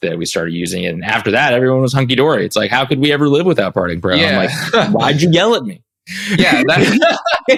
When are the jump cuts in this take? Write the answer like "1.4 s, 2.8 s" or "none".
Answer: none

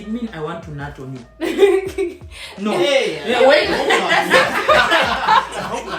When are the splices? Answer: none

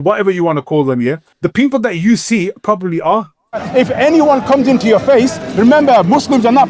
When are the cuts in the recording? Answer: 1.3 s, 3.6 s

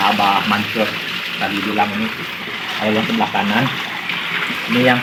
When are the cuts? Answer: none

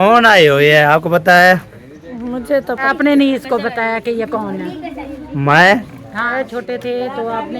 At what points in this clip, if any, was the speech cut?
2.9 s, 6.2 s

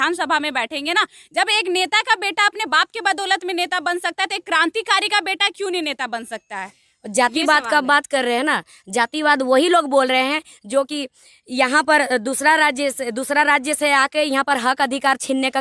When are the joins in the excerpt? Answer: none

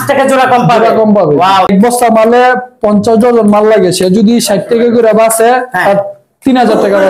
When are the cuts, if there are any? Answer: 1.7 s

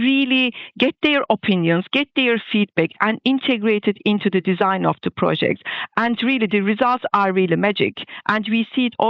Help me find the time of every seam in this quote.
none

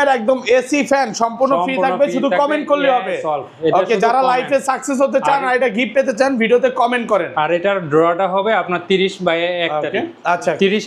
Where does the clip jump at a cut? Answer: none

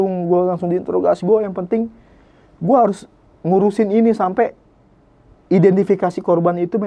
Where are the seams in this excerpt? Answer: none

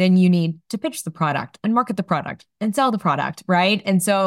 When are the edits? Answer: none

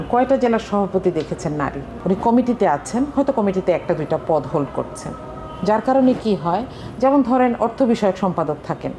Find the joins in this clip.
none

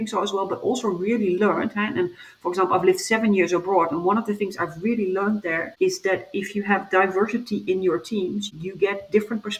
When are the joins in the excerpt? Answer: none

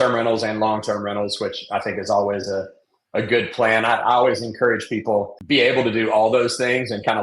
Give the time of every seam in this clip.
5.4 s

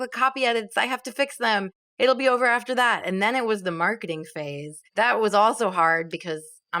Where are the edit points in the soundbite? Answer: none

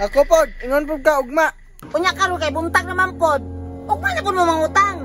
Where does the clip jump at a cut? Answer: 1.7 s

